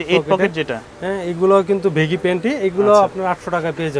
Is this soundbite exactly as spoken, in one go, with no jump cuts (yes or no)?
yes